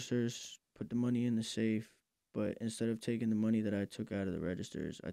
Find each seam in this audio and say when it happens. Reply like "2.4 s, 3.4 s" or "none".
none